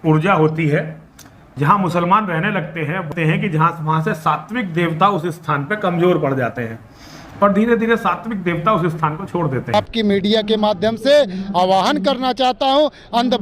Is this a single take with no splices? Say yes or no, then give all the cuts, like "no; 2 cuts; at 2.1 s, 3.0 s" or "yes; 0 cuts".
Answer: no; 2 cuts; at 3.1 s, 9.7 s